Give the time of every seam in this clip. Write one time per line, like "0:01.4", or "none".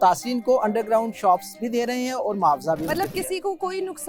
none

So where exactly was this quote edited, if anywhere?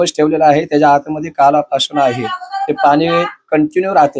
none

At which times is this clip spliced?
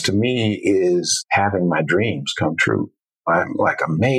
0:01.2
0:03.2

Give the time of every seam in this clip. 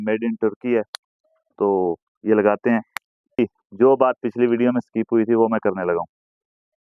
0:03.4

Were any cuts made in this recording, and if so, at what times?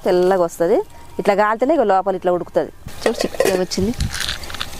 0:02.8

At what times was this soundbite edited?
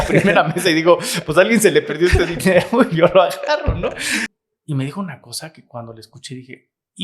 0:04.3

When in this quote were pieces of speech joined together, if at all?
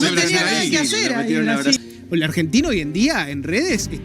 0:01.8

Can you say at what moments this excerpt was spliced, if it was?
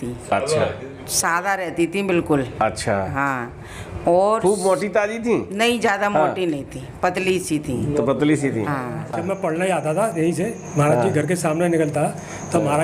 0:09.2

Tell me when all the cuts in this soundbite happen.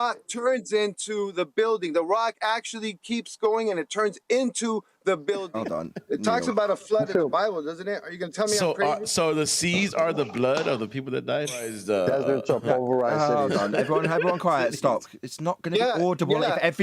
0:05.5
0:11.7

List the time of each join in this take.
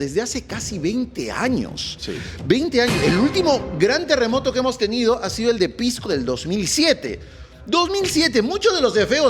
none

